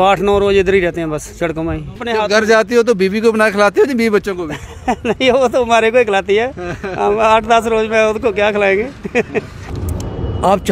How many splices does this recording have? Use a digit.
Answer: 2